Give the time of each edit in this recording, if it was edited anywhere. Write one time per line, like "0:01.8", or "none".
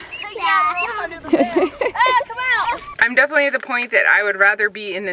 0:03.0